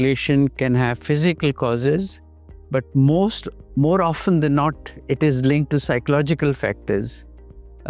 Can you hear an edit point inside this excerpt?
no; 0 cuts

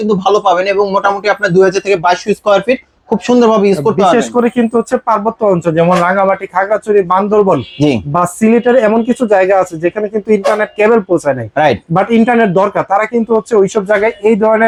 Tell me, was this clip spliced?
no; 0 cuts

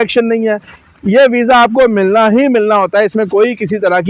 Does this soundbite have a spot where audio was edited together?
no; 0 cuts

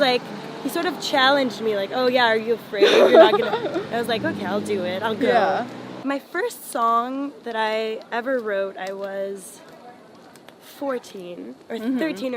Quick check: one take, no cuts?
no; 1 cut; at 5.9 s

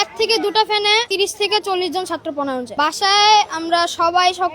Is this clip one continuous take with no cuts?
no; 1 cut; at 1.1 s

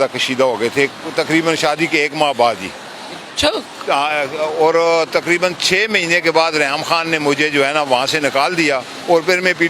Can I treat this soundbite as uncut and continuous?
yes; 0 cuts

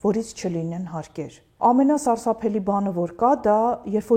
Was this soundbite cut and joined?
yes; 1 cut; at 1.5 s

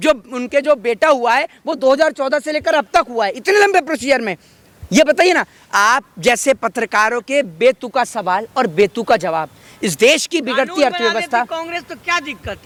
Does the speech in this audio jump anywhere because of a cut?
no; 0 cuts

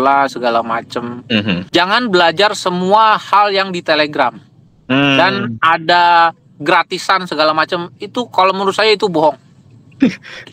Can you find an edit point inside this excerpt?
yes; 1 cut; at 1.6 s

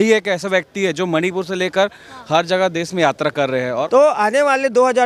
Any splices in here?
yes; 1 cut; at 3.9 s

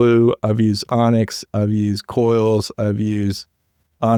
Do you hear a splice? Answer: no; 0 cuts

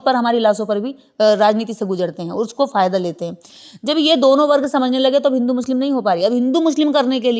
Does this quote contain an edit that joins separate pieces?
no; 0 cuts

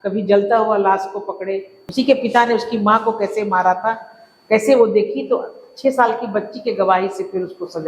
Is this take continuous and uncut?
no; 1 cut; at 1.8 s

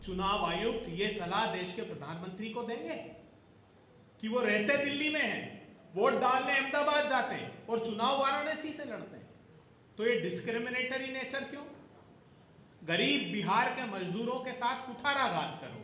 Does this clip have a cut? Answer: no; 0 cuts

